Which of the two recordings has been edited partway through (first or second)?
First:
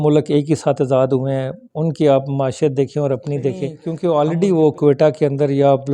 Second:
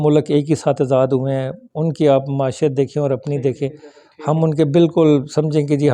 first